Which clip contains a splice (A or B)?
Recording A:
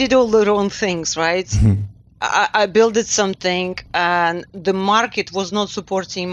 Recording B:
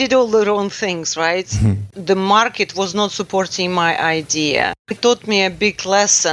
B